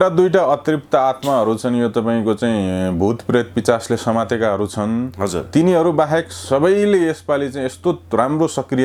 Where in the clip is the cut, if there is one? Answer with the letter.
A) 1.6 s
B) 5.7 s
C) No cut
C